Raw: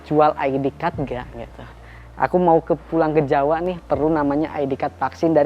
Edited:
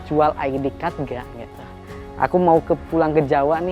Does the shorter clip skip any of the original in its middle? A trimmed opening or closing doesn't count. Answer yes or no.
no